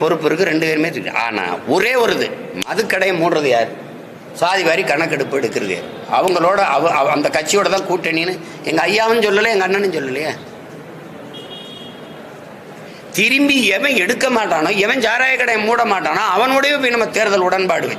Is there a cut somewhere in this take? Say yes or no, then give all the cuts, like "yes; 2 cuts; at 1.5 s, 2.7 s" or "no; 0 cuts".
no; 0 cuts